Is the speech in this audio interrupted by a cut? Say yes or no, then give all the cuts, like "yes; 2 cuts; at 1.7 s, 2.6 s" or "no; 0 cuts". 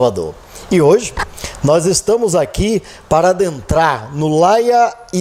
no; 0 cuts